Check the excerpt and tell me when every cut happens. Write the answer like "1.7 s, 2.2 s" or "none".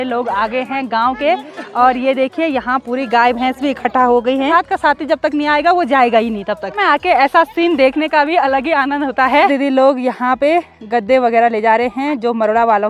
4.5 s, 6.8 s, 9.5 s

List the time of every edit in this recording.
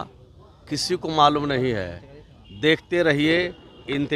none

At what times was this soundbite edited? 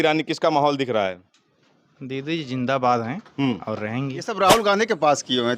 4.3 s

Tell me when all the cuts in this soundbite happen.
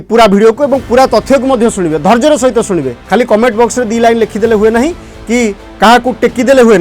3.0 s, 5.6 s

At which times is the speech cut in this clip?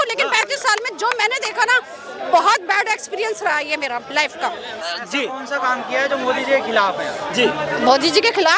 4.8 s

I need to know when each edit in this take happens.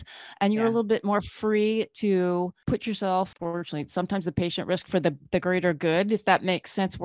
2.6 s, 3.3 s

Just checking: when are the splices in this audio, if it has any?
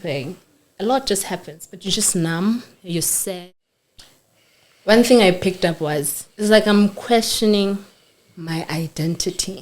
3.4 s

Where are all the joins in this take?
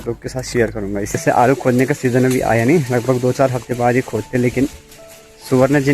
1.2 s

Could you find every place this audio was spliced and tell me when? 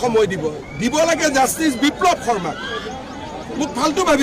2.8 s

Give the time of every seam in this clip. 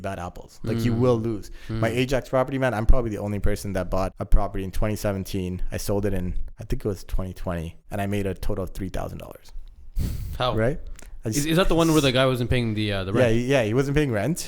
4.2 s, 6.5 s, 7.8 s

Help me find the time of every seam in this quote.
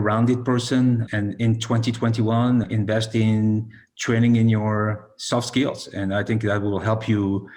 1.1 s, 2.7 s

